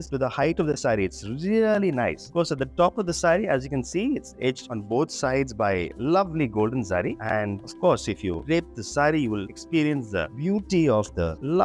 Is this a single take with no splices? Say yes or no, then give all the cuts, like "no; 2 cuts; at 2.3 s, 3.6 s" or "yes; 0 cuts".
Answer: yes; 0 cuts